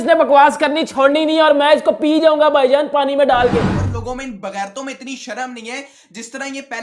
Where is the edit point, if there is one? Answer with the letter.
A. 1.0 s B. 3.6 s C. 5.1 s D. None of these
B